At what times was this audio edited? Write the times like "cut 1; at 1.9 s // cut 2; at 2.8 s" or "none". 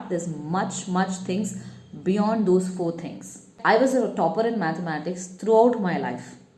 cut 1; at 3.5 s